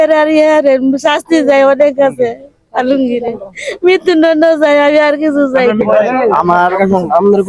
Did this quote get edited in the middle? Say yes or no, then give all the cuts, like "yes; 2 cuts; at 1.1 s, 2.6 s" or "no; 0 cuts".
yes; 1 cut; at 5.8 s